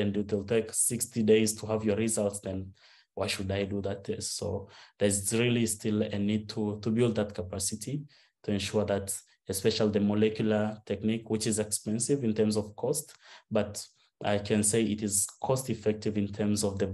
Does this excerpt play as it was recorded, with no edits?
yes; 0 cuts

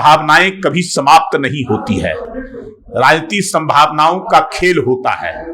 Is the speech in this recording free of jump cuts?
yes; 0 cuts

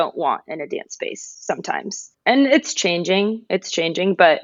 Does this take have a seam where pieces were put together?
no; 0 cuts

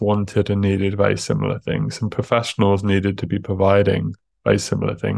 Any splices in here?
no; 0 cuts

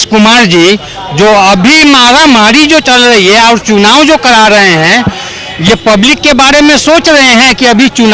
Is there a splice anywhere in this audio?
no; 0 cuts

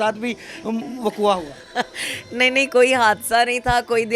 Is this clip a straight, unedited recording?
yes; 0 cuts

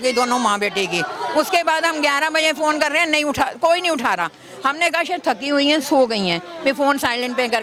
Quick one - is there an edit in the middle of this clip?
no; 0 cuts

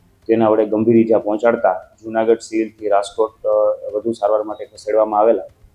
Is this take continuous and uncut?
no; 1 cut; at 1.9 s

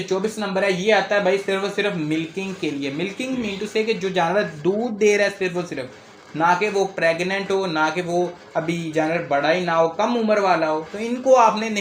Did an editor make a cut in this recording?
no; 0 cuts

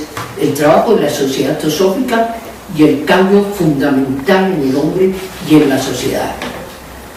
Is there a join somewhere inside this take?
no; 0 cuts

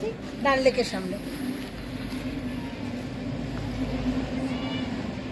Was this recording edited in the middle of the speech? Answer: no; 0 cuts

